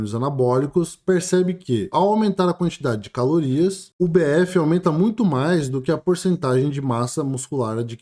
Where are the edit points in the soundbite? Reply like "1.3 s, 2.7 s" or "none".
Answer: none

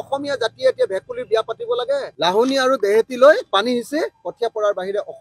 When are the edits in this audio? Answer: 2.1 s

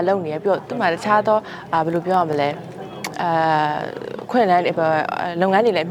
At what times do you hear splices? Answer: none

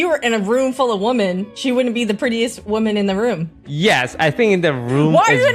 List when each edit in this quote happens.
1.5 s, 2.6 s, 3.7 s

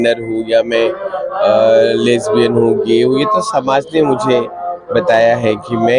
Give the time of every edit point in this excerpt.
none

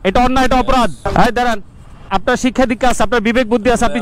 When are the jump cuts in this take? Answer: 1.1 s, 2.1 s

